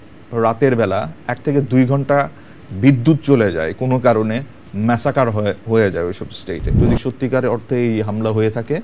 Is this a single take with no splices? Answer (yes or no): no